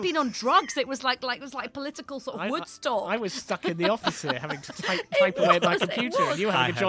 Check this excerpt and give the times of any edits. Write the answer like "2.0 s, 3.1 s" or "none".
none